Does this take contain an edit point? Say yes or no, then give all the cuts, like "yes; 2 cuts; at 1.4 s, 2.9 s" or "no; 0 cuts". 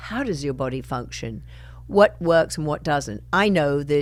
no; 0 cuts